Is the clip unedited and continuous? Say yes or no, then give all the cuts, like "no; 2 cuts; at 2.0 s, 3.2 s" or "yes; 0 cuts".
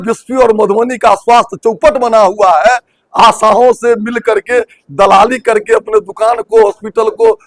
yes; 0 cuts